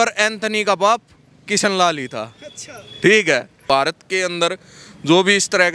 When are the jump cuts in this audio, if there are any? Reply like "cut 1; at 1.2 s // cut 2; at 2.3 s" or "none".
cut 1; at 3.5 s